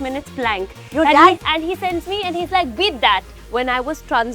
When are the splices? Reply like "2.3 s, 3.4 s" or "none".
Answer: 1.4 s, 3.4 s